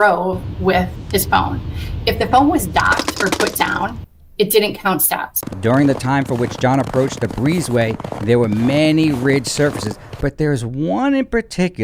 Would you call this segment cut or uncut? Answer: cut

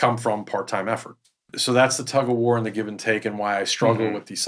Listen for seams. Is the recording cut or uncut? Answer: cut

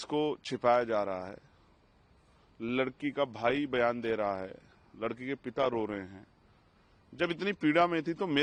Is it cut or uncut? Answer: uncut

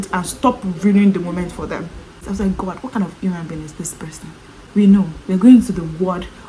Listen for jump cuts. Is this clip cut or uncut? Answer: uncut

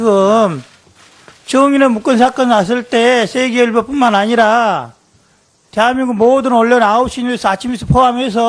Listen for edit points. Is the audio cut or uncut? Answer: cut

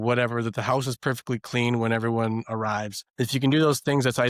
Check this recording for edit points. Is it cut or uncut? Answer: uncut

